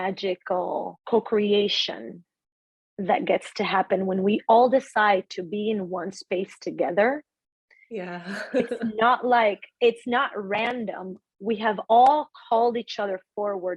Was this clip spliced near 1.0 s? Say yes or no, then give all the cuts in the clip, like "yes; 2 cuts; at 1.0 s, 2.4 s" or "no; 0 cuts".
yes; 1 cut; at 1.0 s